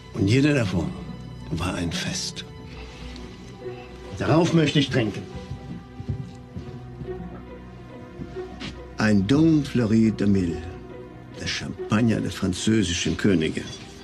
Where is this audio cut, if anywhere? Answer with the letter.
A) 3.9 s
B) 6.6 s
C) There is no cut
B